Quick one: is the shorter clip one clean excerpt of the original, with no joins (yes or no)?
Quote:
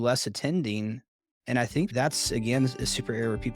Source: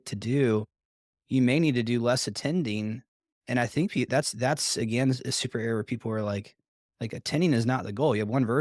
no